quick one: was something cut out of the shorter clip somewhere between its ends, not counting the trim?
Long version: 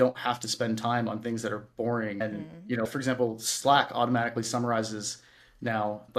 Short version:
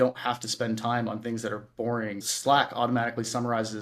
yes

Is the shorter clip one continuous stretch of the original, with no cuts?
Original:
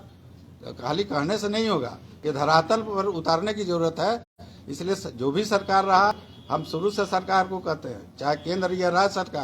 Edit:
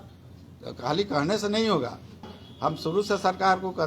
no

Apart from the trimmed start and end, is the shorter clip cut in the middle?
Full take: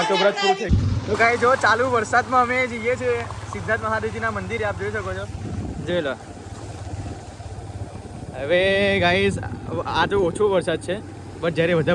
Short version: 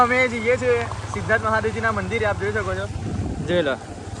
no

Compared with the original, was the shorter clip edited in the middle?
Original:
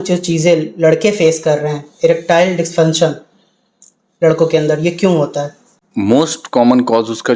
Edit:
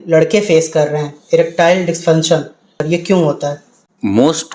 yes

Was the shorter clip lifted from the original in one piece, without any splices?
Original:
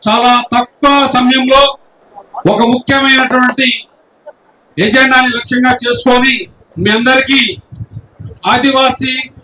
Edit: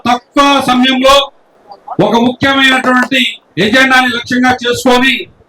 no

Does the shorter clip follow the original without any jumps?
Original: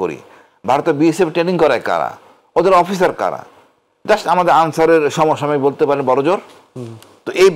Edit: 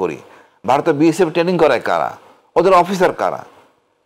yes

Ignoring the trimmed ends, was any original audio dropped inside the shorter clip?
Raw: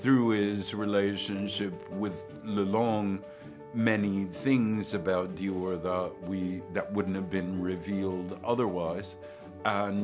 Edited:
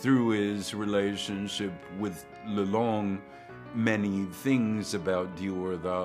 no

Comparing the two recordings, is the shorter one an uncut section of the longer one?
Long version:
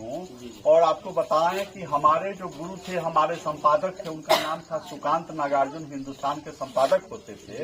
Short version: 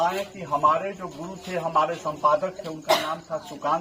yes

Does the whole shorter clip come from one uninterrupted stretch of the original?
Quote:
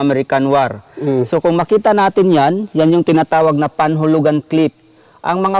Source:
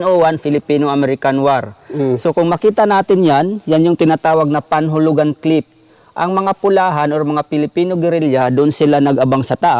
yes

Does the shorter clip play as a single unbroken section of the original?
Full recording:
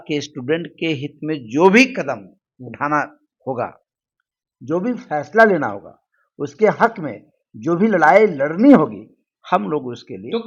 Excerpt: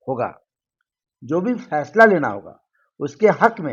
yes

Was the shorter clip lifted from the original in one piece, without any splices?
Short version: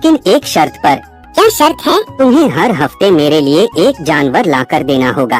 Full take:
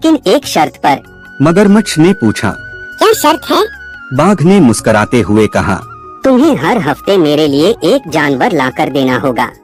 no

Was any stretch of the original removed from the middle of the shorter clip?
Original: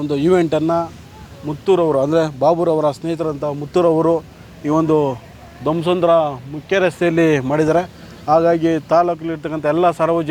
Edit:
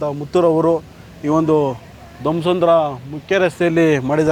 no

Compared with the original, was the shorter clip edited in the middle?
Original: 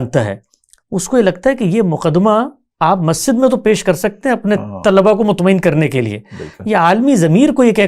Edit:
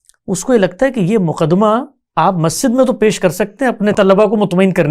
yes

